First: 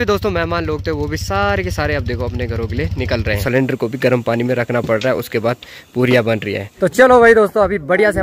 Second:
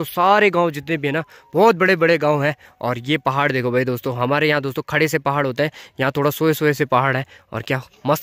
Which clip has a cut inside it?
first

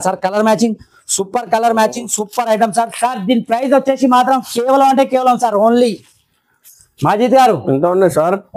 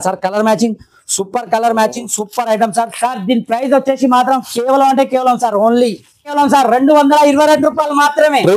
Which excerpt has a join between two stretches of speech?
second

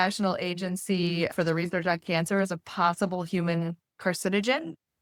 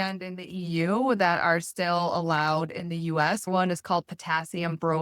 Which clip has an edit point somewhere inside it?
second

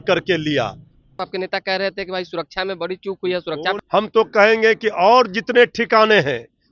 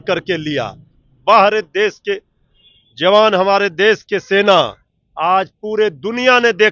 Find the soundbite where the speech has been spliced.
first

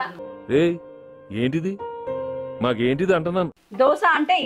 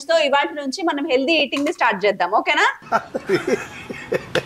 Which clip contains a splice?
first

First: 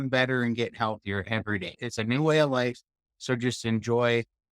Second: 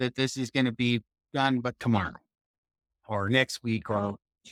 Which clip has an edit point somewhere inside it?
first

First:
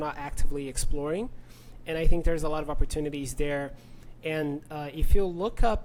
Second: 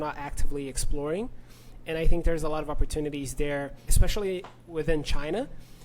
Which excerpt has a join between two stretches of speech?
second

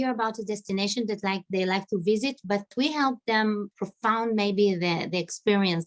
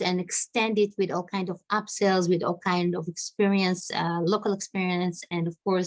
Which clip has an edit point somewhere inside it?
first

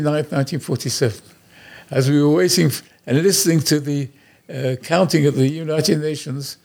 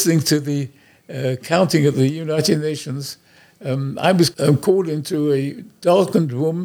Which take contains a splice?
second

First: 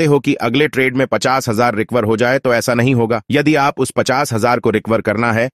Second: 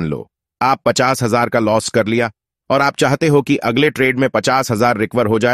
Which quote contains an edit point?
first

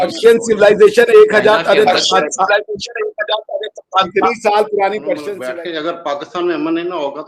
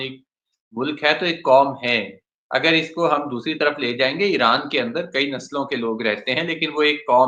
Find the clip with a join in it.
first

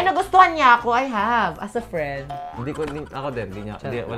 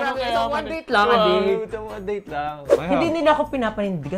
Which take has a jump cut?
second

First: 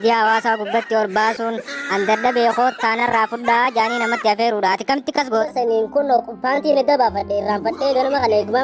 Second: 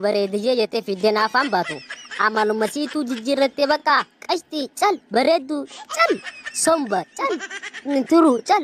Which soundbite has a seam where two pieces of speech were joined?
first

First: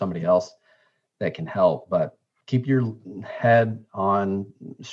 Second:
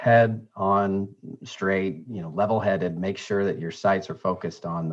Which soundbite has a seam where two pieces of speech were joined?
first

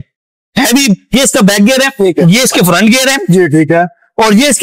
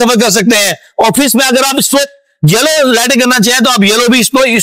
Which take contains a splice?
first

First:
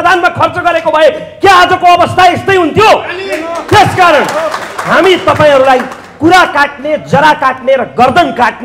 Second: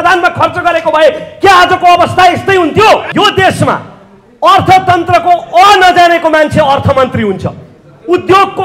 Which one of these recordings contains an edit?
second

